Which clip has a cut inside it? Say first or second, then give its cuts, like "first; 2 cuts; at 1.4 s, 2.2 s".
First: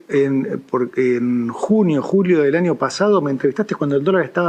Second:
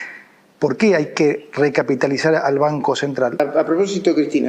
second; 1 cut; at 3.4 s